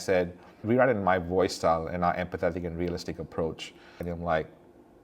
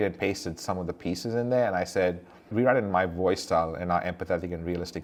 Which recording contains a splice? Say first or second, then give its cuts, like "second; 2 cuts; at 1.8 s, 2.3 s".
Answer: first; 1 cut; at 4.1 s